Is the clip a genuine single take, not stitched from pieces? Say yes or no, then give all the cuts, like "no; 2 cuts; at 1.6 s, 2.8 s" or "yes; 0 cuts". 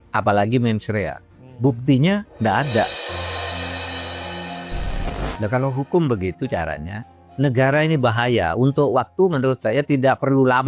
no; 1 cut; at 5.1 s